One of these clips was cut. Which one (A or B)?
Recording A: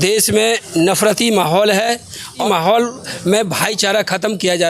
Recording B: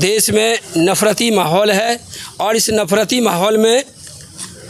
A